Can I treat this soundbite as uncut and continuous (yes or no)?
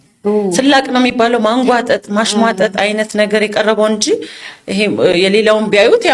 yes